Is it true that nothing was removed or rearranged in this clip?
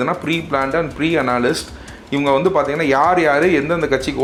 yes; 0 cuts

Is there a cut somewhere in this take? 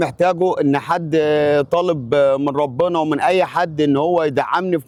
no; 0 cuts

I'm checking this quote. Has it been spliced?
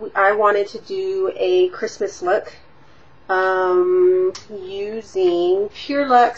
no; 0 cuts

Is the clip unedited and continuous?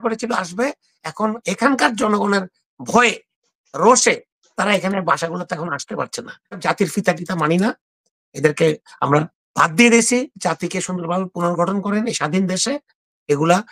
no; 1 cut; at 6.6 s

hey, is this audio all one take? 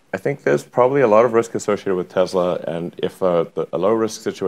yes; 0 cuts

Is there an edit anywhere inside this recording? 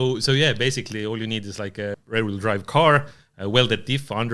yes; 1 cut; at 2.0 s

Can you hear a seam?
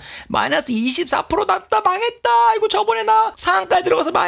yes; 1 cut; at 3.4 s

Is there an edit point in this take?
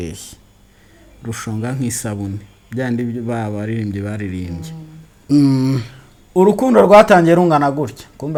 no; 0 cuts

